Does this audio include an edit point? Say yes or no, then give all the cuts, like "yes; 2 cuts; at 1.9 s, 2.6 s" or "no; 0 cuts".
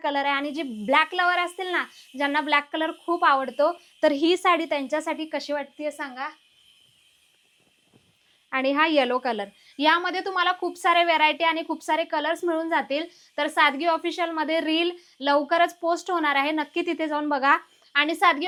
no; 0 cuts